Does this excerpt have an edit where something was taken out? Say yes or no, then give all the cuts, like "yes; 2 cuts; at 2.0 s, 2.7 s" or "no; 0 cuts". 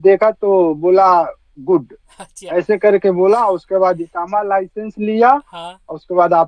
no; 0 cuts